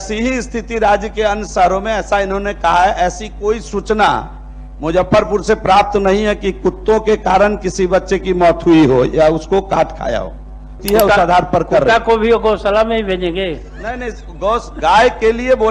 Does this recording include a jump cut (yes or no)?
yes